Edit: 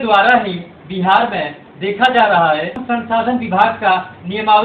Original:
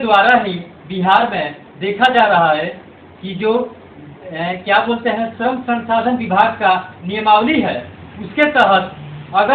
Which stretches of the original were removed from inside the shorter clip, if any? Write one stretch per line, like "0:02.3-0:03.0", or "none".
0:02.8-0:05.6